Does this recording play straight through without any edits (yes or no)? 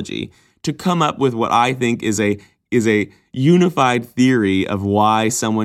yes